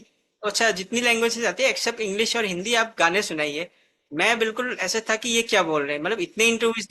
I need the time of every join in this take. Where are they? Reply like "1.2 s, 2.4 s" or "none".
none